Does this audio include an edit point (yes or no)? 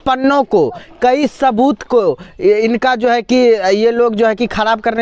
no